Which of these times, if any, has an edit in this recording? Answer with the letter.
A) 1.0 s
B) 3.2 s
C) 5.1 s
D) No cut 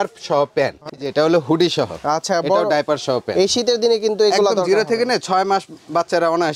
A